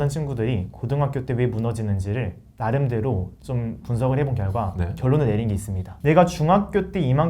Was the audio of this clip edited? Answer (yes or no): yes